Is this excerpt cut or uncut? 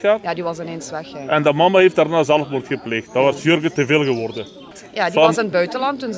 cut